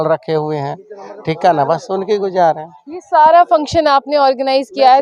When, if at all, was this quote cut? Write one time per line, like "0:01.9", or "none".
none